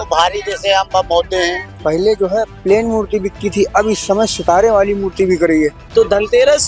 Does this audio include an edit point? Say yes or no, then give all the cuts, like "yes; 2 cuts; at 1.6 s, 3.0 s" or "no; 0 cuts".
yes; 2 cuts; at 1.7 s, 5.8 s